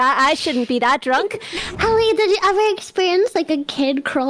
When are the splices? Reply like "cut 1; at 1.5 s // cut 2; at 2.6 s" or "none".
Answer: cut 1; at 1.7 s